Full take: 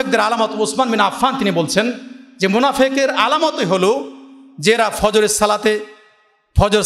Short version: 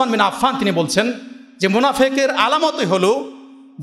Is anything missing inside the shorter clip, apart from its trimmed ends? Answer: no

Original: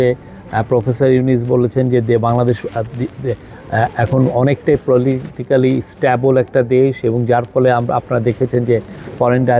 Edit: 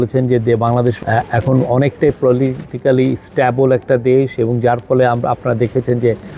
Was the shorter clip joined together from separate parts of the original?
yes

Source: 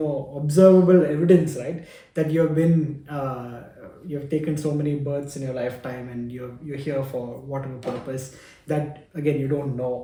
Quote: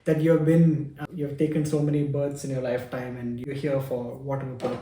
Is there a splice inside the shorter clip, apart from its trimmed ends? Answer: yes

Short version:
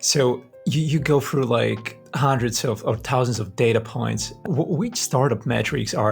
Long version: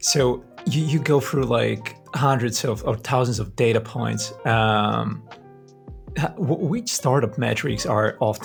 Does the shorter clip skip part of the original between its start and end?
yes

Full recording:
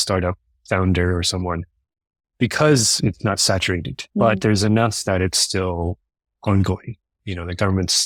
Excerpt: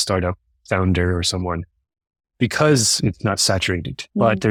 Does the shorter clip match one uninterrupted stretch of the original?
yes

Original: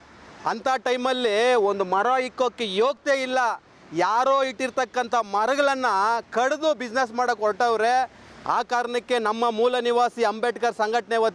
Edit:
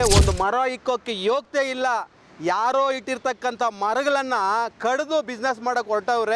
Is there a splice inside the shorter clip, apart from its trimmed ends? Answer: no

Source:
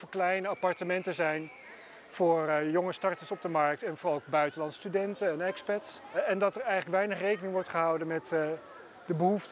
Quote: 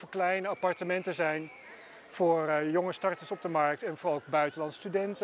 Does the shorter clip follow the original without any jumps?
yes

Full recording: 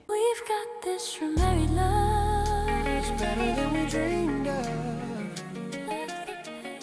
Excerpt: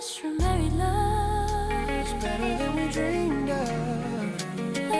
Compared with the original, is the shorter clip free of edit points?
yes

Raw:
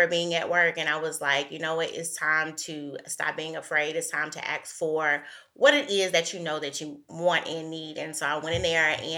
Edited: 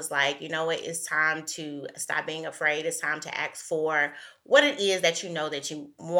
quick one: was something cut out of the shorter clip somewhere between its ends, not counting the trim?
no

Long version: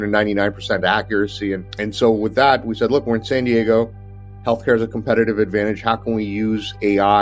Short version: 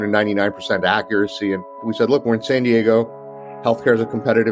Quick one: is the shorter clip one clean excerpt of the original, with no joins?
no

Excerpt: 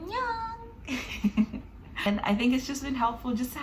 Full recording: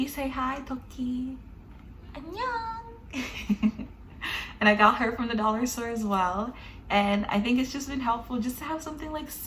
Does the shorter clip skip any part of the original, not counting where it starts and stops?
yes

